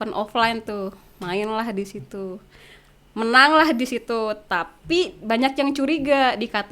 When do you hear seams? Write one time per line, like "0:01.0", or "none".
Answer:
none

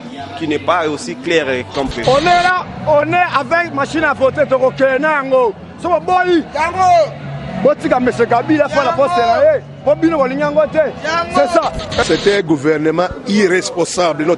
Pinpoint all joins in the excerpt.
0:01.9
0:12.0

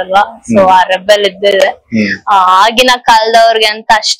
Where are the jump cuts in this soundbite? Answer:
none

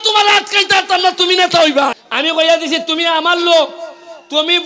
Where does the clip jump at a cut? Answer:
0:02.0

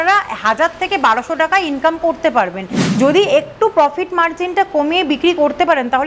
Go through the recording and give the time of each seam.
0:02.8

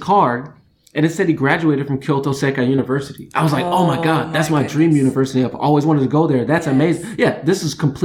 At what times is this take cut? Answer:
none

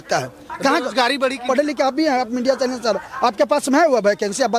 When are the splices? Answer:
0:01.4

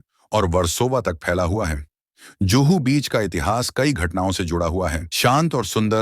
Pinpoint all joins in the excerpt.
0:05.1

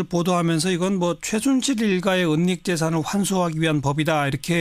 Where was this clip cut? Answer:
0:01.0

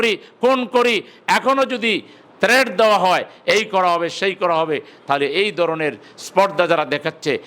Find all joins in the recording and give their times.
none

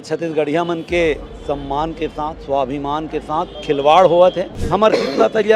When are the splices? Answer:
0:03.6
0:04.5

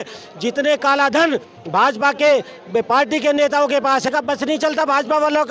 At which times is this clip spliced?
0:04.1

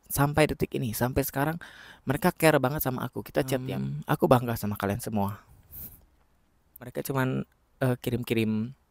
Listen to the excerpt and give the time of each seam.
0:03.5
0:06.9

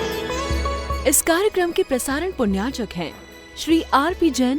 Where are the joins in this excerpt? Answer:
0:00.9

